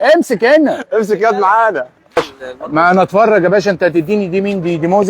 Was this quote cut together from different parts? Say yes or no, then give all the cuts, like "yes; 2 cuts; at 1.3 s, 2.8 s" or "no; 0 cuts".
yes; 1 cut; at 2.2 s